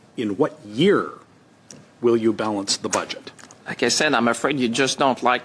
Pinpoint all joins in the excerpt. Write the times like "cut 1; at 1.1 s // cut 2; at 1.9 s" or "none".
none